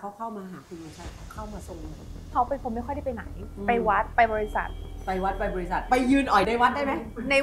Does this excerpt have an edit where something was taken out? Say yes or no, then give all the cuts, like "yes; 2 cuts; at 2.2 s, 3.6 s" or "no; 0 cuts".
yes; 1 cut; at 2.3 s